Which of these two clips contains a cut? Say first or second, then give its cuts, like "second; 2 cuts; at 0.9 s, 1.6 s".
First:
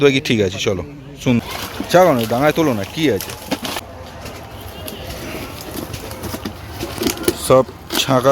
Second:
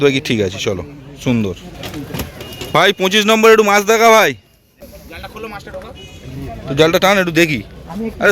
first; 2 cuts; at 1.4 s, 3.8 s